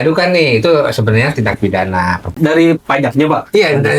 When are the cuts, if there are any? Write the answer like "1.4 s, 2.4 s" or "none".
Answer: 2.3 s